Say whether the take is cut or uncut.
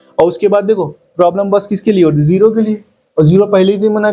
uncut